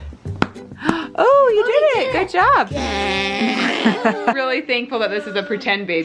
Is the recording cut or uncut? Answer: cut